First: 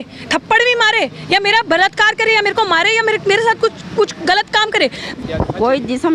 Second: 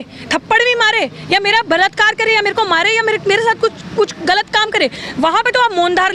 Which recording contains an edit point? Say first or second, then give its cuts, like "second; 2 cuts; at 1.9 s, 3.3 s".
first; 1 cut; at 5.1 s